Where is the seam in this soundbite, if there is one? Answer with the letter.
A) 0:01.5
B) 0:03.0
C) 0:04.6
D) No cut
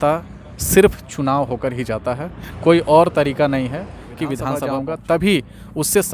C